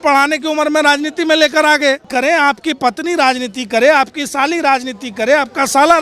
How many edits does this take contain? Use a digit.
1